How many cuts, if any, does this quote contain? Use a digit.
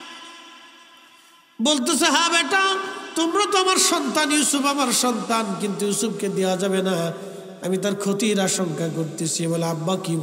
0